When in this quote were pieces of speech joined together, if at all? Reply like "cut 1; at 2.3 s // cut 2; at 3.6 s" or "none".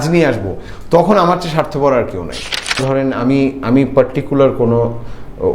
cut 1; at 2.8 s